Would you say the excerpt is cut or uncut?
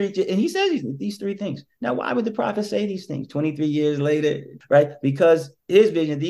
cut